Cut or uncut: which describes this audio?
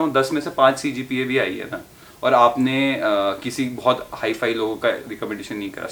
uncut